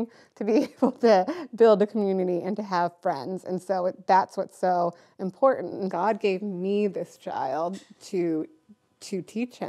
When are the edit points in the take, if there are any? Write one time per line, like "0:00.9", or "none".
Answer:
0:05.9